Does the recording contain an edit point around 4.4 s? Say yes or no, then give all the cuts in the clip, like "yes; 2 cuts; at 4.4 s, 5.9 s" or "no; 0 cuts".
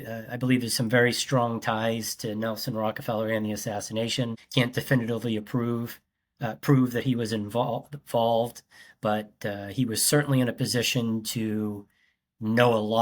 yes; 1 cut; at 4.4 s